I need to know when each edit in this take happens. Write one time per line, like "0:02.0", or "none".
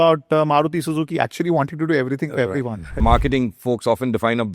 0:02.9